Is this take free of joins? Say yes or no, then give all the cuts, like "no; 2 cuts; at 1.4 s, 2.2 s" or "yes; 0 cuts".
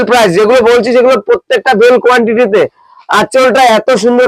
yes; 0 cuts